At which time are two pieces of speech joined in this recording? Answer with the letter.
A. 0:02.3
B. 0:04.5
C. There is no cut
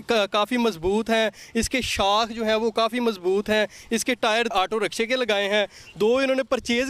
B